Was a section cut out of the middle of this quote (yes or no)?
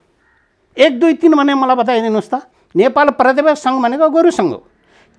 yes